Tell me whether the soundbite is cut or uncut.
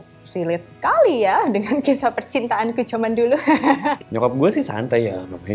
cut